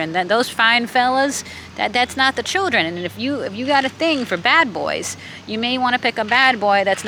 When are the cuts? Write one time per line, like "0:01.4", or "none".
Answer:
none